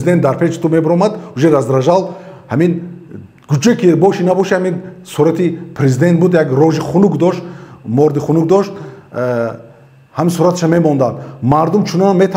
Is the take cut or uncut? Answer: uncut